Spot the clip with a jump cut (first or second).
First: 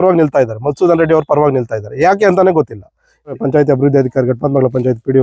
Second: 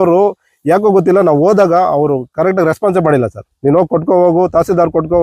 first